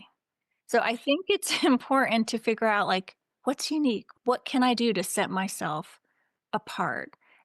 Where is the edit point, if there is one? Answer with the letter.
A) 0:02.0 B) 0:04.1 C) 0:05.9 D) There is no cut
B